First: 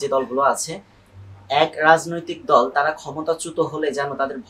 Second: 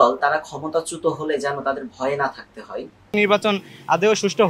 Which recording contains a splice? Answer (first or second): second